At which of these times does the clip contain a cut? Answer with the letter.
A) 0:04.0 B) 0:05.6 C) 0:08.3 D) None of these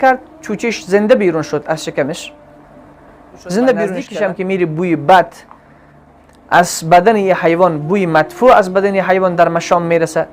A